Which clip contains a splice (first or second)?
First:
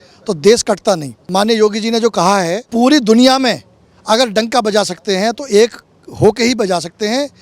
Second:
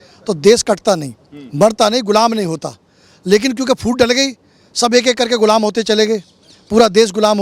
first